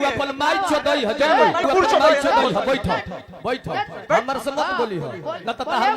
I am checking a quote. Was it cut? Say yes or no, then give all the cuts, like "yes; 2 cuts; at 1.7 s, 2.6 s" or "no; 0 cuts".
yes; 1 cut; at 1.6 s